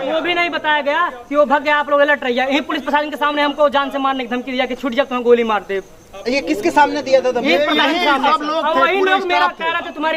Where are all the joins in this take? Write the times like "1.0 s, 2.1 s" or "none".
none